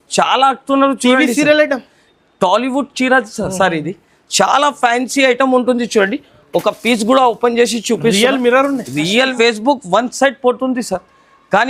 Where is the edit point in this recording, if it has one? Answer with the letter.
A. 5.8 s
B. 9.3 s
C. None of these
B